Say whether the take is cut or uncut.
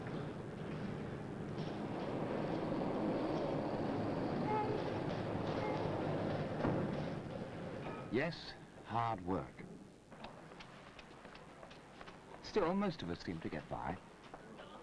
cut